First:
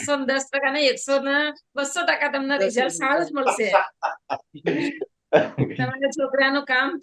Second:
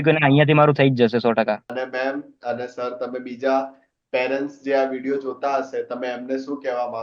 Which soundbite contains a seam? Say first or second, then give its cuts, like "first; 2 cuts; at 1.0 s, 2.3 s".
second; 1 cut; at 1.7 s